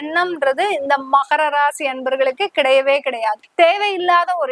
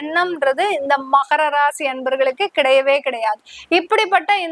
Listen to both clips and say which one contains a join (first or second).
first